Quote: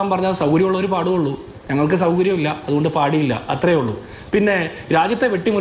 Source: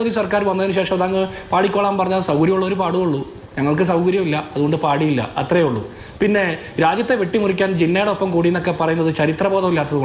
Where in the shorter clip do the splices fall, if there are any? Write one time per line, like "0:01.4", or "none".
none